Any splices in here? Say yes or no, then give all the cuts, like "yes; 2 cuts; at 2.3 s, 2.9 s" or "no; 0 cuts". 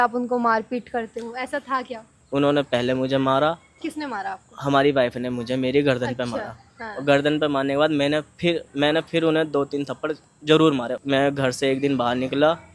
yes; 2 cuts; at 2.2 s, 10.9 s